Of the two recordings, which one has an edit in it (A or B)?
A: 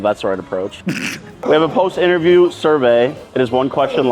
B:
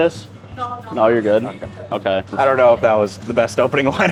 A